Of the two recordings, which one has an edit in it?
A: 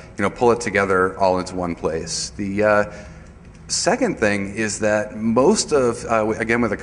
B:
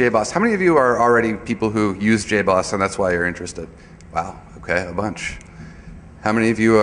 A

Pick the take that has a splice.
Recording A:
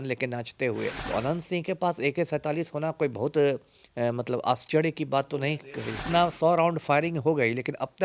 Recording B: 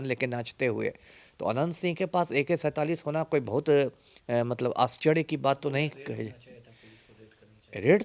A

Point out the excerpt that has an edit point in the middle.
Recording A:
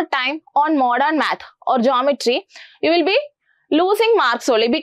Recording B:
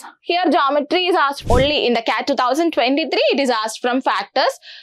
B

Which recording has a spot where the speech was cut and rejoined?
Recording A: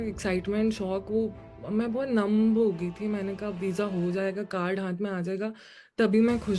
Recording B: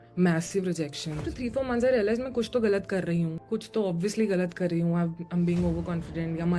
B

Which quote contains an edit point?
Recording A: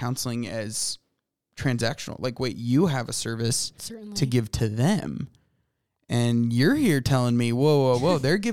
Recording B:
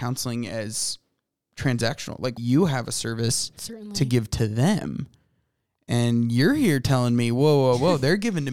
B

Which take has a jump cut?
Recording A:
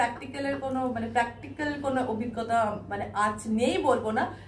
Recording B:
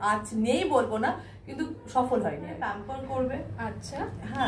B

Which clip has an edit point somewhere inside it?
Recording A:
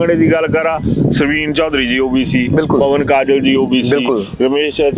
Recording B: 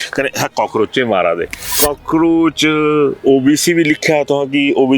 B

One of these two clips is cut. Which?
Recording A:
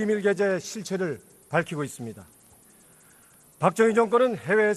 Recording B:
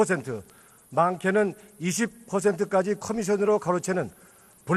B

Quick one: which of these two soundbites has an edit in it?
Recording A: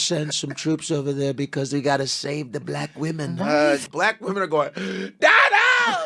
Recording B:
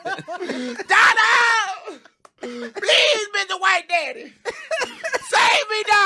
A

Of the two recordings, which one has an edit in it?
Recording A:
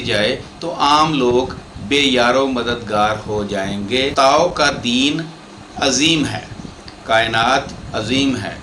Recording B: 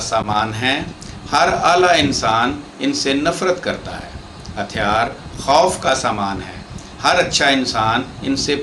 A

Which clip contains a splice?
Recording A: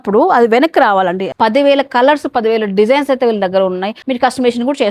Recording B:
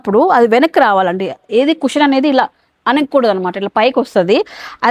A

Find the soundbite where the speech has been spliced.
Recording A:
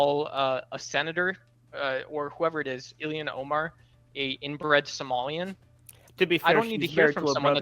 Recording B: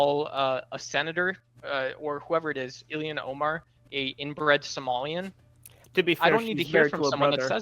B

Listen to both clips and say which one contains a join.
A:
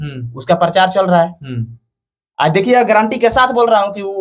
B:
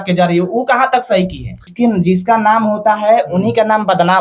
B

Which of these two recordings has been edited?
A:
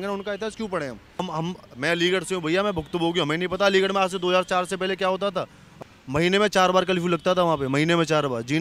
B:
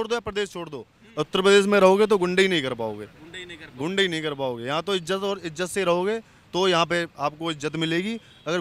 A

